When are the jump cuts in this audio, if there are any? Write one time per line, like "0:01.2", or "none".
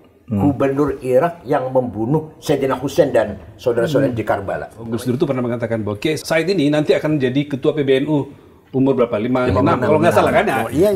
0:04.8
0:06.2